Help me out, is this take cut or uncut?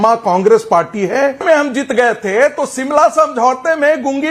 cut